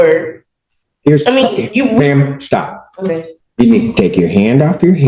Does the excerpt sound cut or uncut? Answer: cut